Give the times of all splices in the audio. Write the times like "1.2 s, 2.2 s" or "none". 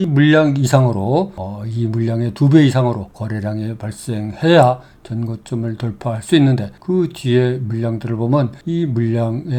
none

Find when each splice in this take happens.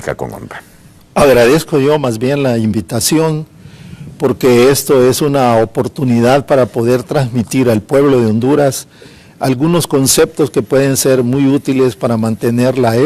6.9 s

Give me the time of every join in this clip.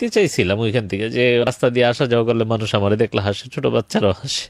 1.5 s

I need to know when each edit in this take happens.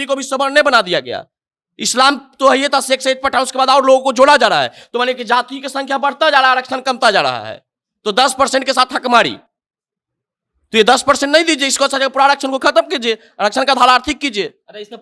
none

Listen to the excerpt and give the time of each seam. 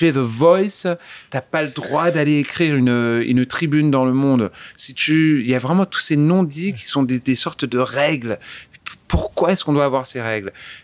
none

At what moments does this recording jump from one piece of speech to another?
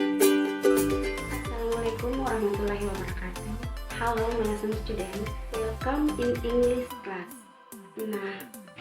1.5 s

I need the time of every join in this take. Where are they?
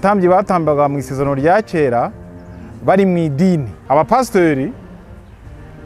3.7 s

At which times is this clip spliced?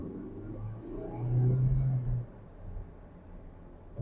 none

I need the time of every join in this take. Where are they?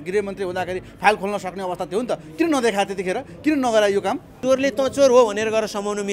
4.3 s

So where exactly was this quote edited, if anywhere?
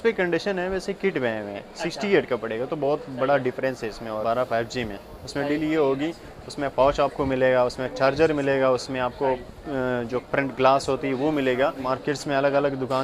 4.2 s, 11.8 s

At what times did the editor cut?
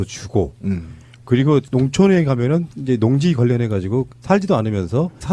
3.6 s

